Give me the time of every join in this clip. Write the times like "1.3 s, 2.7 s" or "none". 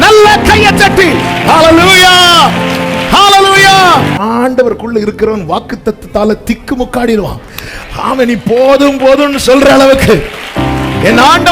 4.2 s